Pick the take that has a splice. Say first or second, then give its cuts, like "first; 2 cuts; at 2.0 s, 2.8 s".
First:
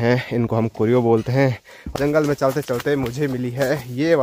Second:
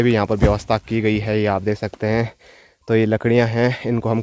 first; 1 cut; at 1.9 s